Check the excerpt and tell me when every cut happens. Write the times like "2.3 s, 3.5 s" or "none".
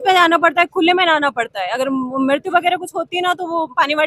none